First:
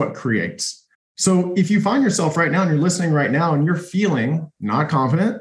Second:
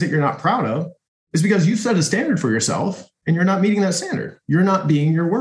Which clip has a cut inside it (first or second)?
second